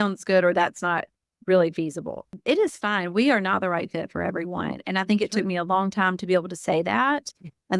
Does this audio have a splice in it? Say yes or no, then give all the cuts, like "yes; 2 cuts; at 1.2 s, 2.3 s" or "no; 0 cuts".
yes; 1 cut; at 2.3 s